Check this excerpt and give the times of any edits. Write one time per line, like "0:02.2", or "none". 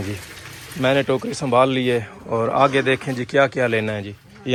none